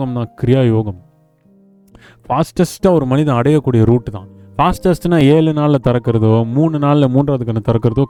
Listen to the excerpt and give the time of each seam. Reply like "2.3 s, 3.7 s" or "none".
none